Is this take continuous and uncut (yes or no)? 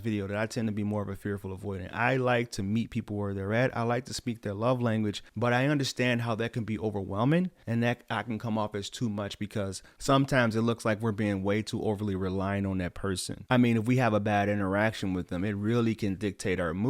no